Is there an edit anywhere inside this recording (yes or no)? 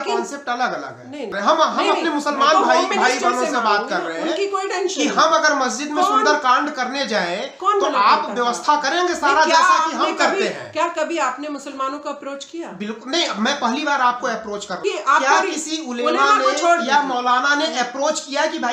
yes